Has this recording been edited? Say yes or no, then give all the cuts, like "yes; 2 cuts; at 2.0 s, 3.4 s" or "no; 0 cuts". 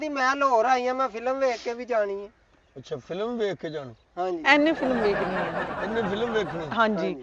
no; 0 cuts